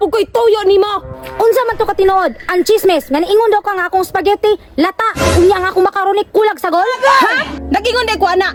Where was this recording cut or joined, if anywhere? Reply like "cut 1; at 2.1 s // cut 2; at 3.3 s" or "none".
none